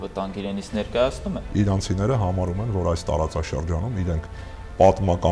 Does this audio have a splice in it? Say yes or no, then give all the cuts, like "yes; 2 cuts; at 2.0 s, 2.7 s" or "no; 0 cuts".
yes; 1 cut; at 1.4 s